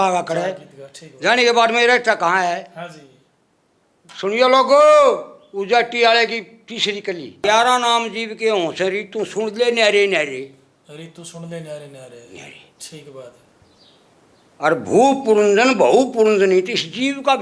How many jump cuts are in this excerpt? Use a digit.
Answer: 1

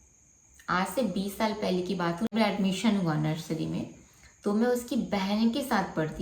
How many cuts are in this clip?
1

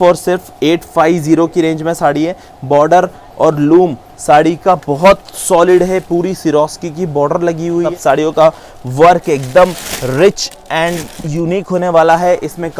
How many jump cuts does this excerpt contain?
1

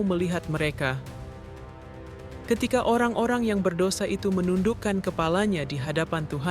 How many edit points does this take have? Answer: 2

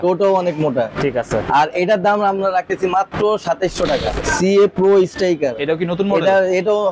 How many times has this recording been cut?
2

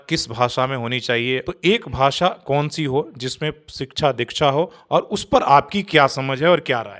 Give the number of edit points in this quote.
1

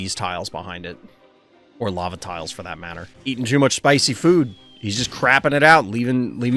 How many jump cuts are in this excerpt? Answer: 1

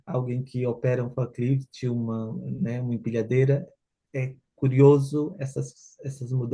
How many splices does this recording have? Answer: 0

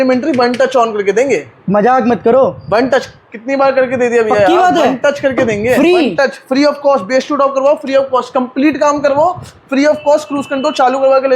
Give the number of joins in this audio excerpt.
0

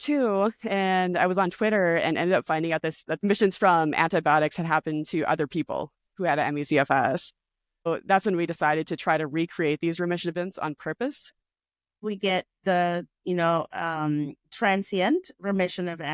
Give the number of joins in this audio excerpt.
3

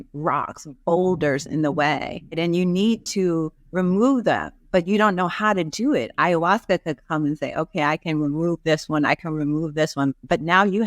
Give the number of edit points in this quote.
1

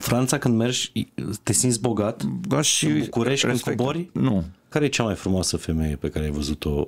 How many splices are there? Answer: 1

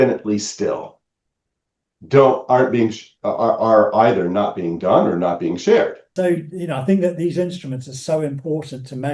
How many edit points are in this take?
1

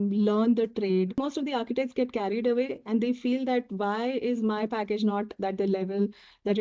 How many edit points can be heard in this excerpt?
1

